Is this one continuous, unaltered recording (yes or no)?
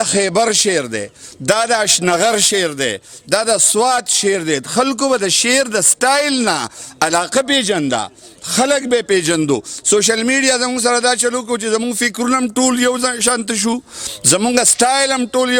yes